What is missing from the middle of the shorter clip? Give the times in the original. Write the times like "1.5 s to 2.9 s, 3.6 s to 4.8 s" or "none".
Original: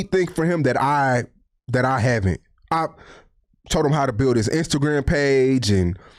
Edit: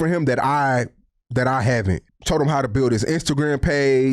2.5 s to 3.6 s